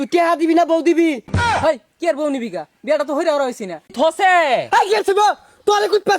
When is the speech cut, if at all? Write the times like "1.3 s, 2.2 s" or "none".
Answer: 1.4 s, 3.9 s